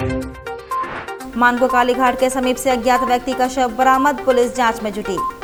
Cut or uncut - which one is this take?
uncut